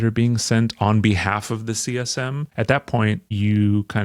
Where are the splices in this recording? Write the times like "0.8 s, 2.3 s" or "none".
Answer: none